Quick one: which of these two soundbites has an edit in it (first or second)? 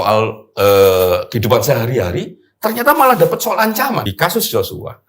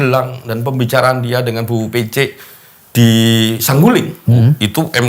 first